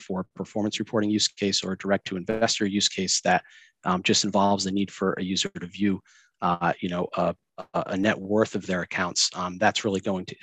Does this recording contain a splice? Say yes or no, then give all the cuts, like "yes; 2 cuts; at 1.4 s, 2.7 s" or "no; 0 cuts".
no; 0 cuts